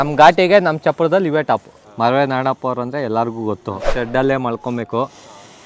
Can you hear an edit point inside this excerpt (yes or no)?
yes